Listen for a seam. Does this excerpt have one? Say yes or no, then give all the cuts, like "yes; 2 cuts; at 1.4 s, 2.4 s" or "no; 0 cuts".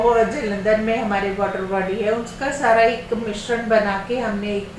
no; 0 cuts